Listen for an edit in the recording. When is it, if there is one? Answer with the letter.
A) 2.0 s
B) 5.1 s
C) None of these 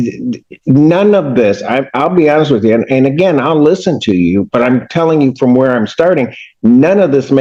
C